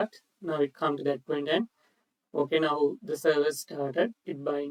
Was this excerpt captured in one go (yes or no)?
yes